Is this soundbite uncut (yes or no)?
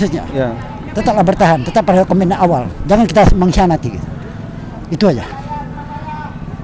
yes